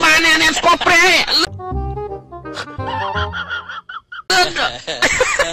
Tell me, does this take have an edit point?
no; 0 cuts

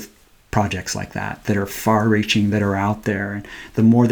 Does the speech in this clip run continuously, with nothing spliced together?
no; 1 cut; at 1.4 s

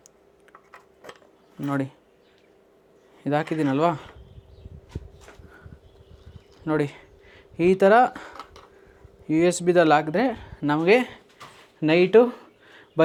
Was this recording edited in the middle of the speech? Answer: no; 0 cuts

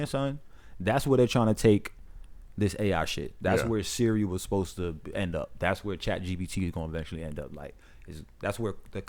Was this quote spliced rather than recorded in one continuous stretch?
no; 0 cuts

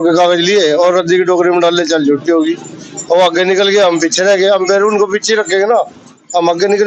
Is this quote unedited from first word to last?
yes; 0 cuts

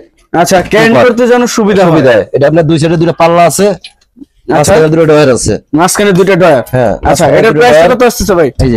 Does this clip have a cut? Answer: no; 0 cuts

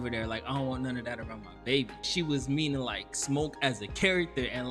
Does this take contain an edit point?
yes; 1 cut; at 2.1 s

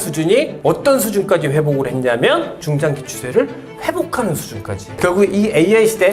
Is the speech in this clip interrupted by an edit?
yes; 2 cuts; at 2.5 s, 5.0 s

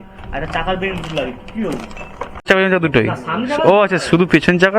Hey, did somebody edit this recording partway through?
yes; 1 cut; at 2.5 s

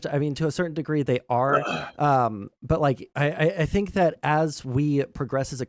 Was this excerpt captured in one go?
no; 1 cut; at 3.1 s

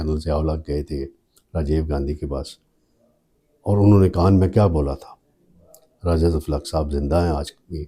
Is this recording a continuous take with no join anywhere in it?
yes; 0 cuts

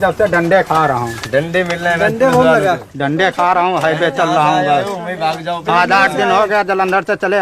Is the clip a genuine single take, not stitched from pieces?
yes; 0 cuts

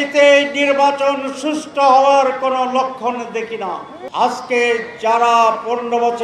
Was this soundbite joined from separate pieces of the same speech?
yes; 1 cut; at 3.9 s

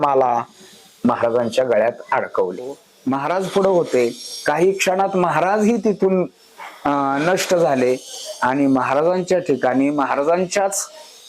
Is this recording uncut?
no; 1 cut; at 2.9 s

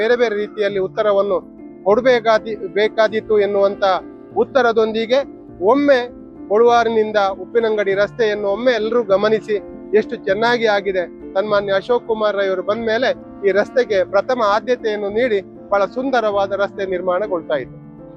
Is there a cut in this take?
no; 0 cuts

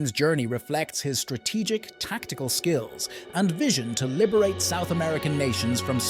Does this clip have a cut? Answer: no; 0 cuts

